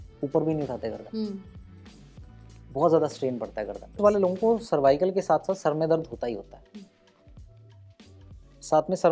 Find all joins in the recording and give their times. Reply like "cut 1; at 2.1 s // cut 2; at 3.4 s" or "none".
cut 1; at 4.0 s